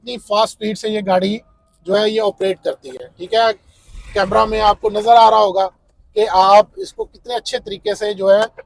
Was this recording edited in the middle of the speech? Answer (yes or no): no